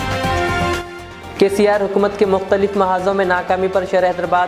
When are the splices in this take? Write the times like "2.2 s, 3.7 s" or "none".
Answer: 1.0 s